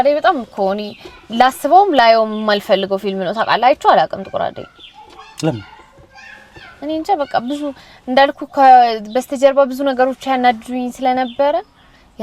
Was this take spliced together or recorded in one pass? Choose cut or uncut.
uncut